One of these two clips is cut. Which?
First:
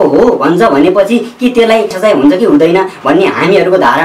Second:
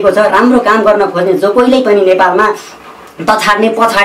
first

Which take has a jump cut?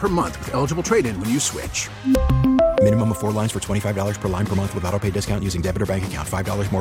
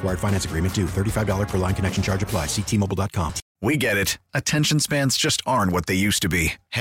second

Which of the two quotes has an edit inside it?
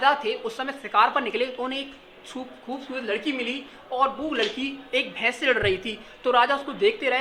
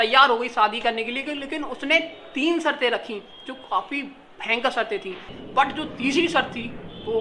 second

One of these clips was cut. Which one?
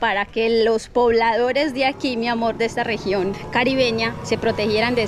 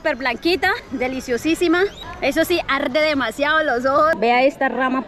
second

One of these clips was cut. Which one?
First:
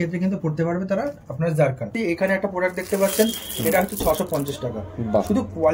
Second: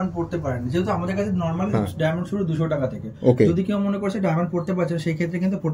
first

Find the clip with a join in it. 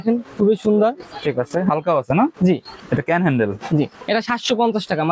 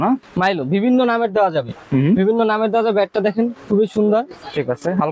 first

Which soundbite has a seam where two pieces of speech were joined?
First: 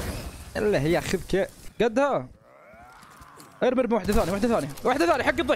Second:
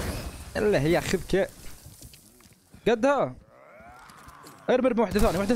first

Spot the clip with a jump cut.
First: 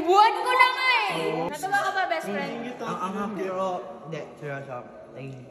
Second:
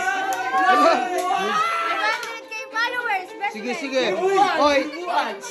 first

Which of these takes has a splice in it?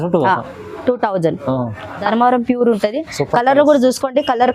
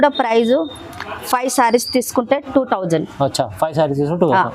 first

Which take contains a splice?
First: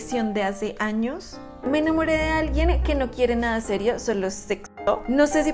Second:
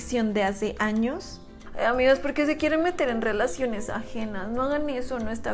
first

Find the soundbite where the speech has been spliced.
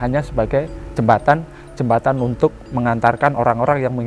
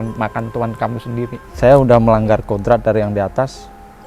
second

